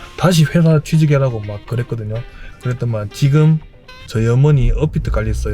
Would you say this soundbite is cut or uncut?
cut